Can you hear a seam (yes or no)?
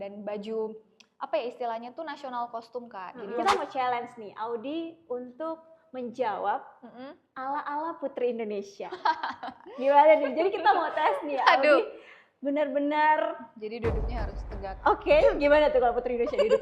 yes